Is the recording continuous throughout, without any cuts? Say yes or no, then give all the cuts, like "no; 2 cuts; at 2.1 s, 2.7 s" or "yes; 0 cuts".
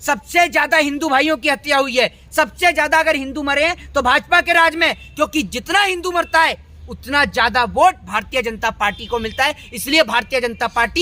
yes; 0 cuts